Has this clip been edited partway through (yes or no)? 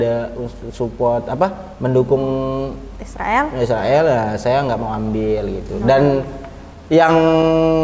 no